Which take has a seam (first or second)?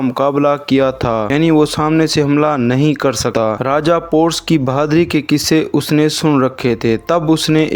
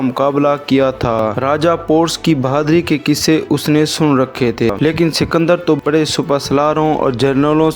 second